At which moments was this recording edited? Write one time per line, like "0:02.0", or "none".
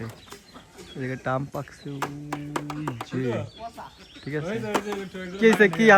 none

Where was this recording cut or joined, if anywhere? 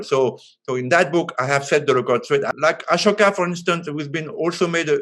0:02.5

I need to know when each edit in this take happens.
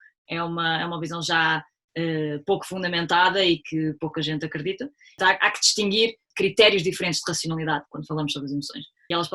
0:05.2
0:06.3

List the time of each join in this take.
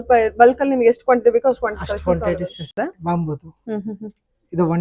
0:02.8

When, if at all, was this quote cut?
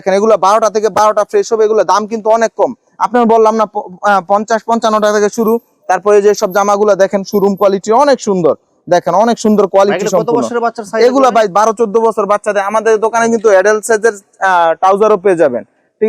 none

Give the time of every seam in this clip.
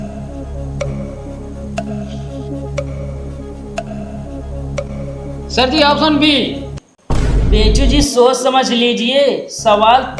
0:05.6

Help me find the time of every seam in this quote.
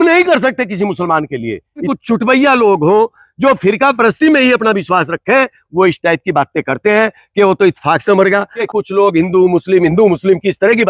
0:01.9
0:08.5

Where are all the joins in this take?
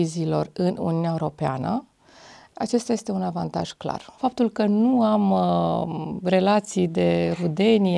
0:04.1

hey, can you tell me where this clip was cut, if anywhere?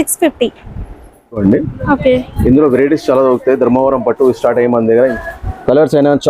0:01.4
0:05.1

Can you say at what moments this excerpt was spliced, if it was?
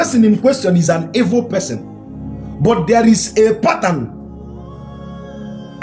none

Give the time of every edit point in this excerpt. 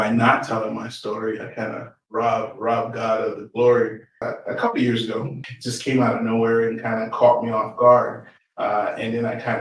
0:04.2
0:05.4

